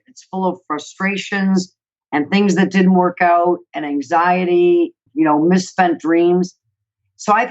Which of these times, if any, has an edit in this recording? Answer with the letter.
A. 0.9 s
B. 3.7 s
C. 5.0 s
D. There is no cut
C